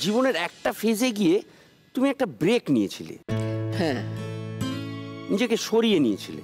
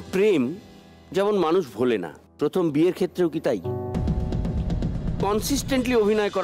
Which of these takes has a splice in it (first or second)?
second